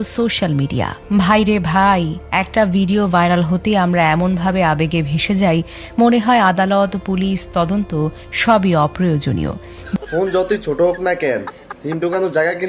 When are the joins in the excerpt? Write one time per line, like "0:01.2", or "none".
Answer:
0:09.7